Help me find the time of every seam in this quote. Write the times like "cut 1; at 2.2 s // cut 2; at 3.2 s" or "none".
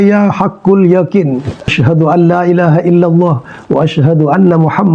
cut 1; at 1.7 s